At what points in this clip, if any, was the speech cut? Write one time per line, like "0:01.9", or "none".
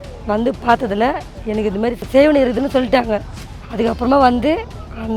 0:02.0